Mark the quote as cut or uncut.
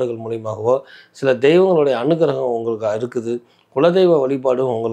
uncut